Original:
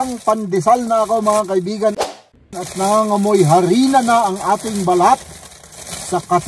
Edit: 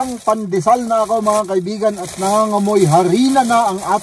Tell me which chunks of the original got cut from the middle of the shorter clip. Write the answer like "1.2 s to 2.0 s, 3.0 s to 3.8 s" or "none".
2.0 s to 2.6 s